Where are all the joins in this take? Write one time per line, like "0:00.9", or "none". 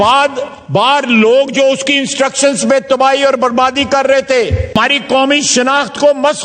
0:04.8